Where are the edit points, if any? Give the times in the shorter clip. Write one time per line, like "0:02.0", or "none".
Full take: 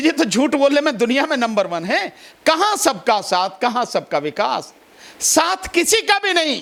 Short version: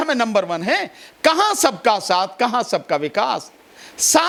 none